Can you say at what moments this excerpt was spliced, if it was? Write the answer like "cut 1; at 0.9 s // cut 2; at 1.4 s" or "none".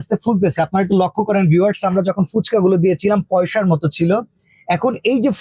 none

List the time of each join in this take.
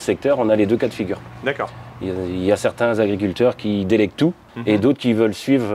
cut 1; at 4.5 s

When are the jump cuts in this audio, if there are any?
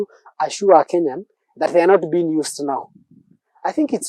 none

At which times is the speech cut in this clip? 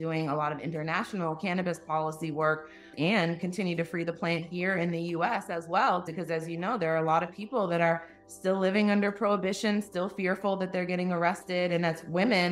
cut 1; at 2.9 s // cut 2; at 6.1 s

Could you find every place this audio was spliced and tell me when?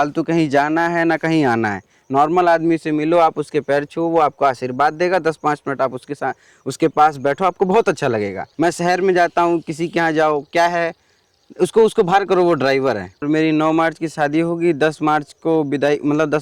cut 1; at 8.4 s // cut 2; at 13.2 s

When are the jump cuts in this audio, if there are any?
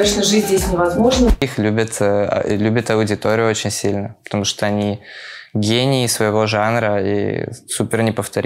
cut 1; at 1.4 s

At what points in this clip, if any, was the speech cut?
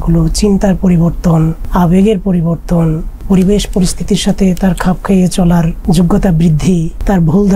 cut 1; at 1.6 s // cut 2; at 3.2 s // cut 3; at 5.8 s

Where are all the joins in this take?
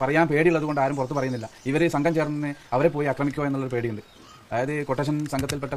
none

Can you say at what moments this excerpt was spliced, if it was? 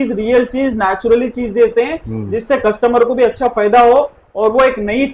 none

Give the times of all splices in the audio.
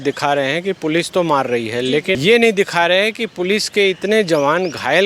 cut 1; at 2.2 s

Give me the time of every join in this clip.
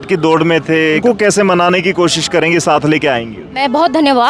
cut 1; at 1.0 s // cut 2; at 3.6 s

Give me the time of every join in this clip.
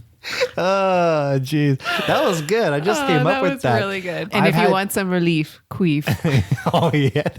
cut 1; at 4.3 s

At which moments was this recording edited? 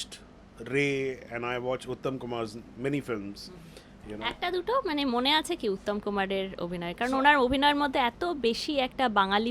none

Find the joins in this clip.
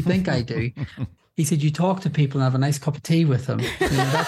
cut 1; at 1.1 s

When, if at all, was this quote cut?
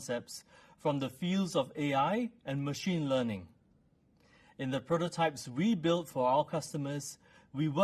none

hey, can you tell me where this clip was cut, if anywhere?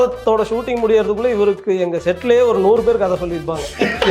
none

